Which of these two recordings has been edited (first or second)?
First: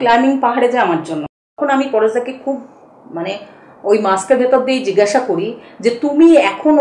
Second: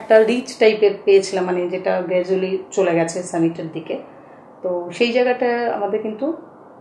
first